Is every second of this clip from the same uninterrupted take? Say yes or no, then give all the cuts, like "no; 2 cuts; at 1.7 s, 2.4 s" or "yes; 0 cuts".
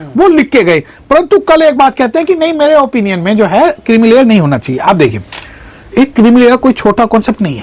yes; 0 cuts